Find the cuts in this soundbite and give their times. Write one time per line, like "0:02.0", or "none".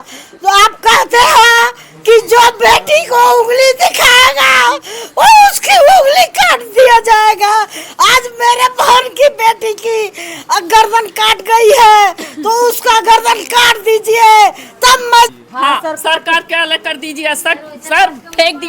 0:15.3